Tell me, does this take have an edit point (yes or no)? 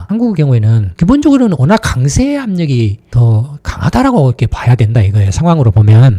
yes